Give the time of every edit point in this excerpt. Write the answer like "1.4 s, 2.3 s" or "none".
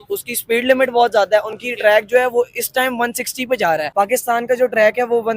3.9 s